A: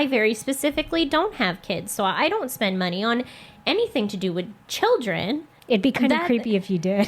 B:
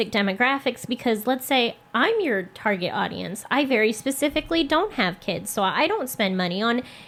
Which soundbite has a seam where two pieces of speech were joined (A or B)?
A